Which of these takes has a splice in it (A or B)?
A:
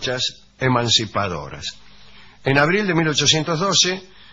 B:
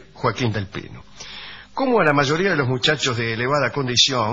A